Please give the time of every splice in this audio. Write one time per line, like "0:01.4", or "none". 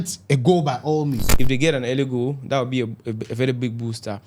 0:01.3